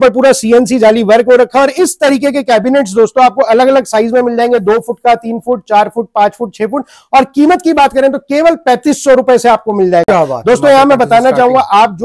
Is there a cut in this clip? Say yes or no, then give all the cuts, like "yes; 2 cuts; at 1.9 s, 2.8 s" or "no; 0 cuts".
no; 0 cuts